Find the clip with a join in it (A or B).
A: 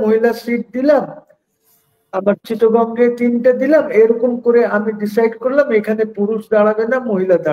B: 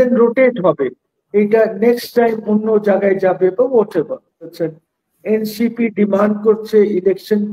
B